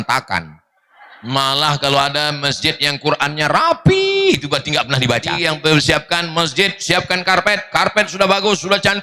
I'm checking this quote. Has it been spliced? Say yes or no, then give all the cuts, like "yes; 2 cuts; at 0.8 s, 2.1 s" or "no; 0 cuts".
yes; 2 cuts; at 1.3 s, 5.3 s